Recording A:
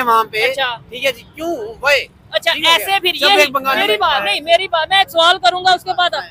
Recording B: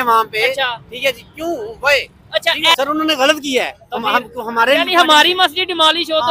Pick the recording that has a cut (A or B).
B